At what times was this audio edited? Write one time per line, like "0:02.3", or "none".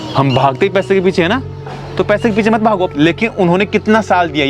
0:02.9